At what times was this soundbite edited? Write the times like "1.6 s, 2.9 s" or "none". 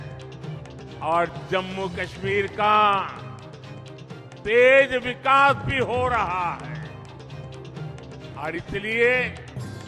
6.7 s, 8.3 s